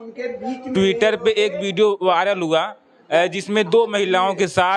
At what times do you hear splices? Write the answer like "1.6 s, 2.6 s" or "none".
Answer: none